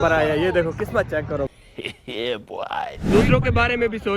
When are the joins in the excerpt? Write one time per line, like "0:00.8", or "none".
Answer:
0:03.0